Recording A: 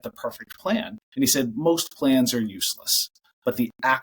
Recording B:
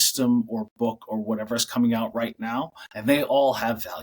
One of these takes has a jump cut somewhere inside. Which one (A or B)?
A